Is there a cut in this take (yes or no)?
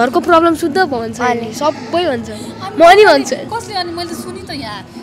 no